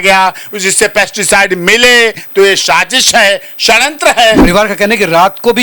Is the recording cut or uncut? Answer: cut